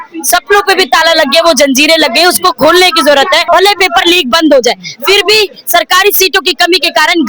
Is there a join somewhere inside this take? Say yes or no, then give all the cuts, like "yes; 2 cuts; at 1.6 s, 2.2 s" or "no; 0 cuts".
yes; 1 cut; at 3.4 s